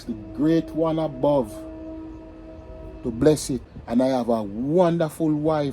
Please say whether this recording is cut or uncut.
cut